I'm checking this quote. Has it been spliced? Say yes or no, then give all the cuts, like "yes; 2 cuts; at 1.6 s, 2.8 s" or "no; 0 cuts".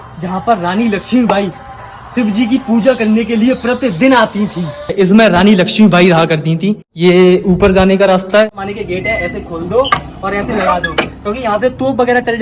yes; 2 cuts; at 4.8 s, 8.6 s